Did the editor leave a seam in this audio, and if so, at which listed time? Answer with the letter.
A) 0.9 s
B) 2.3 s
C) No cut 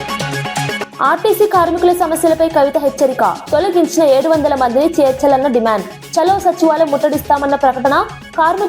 A